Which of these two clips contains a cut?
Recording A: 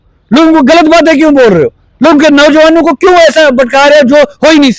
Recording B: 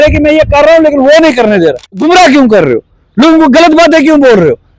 B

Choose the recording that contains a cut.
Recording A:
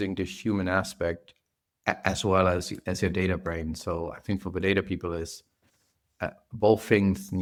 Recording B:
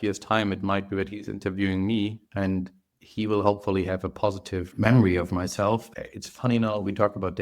B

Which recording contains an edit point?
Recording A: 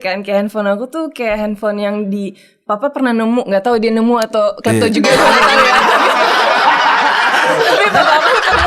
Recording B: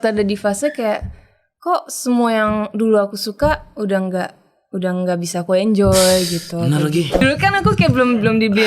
B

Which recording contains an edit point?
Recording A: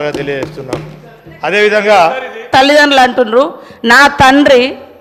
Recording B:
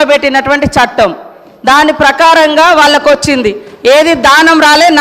A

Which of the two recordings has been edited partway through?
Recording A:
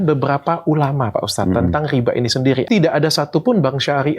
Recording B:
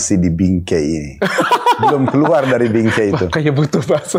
A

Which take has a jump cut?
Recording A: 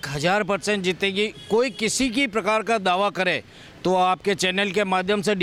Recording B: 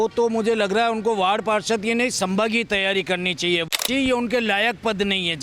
B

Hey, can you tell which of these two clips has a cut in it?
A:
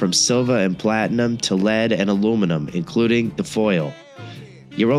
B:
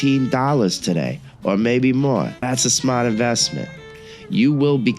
B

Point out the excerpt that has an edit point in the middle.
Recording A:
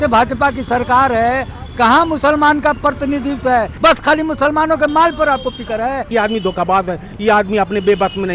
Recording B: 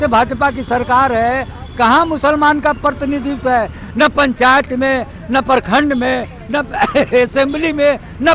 A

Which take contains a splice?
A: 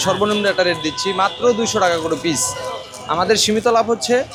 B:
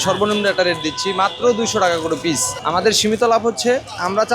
B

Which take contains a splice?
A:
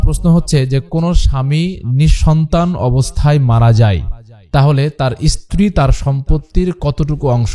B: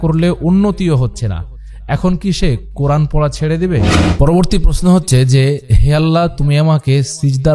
B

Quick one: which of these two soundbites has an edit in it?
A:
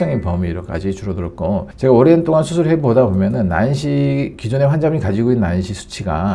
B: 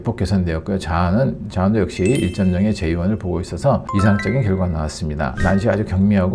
B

